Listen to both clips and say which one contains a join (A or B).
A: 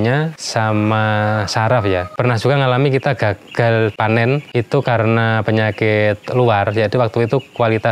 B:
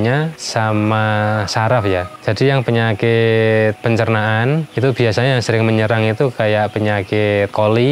A